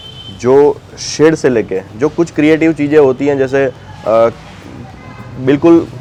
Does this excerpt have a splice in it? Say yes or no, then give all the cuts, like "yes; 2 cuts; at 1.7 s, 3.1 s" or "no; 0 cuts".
no; 0 cuts